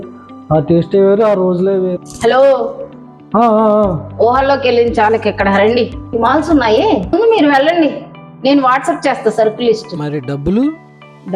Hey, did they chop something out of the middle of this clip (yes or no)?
yes